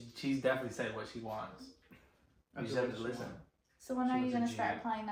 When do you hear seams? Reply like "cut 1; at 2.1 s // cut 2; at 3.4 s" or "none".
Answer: none